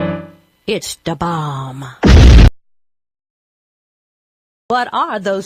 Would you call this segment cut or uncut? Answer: uncut